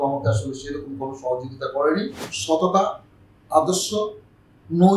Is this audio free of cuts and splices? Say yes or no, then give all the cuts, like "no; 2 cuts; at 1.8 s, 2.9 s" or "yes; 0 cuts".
no; 1 cut; at 2.3 s